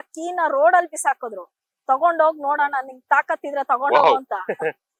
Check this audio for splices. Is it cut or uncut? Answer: uncut